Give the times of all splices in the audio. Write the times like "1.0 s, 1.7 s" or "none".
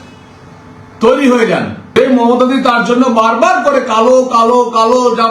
2.0 s

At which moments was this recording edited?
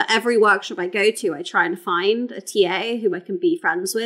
none

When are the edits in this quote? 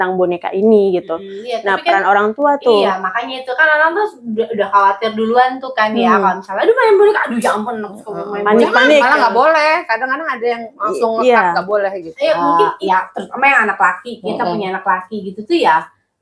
12.4 s

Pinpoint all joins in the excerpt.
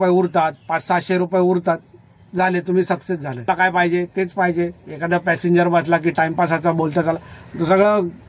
3.5 s

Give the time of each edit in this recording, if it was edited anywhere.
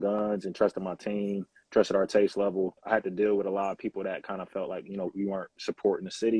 2.8 s

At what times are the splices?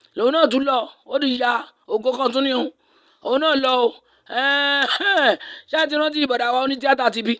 none

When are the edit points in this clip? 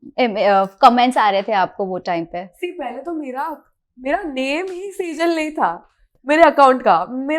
none

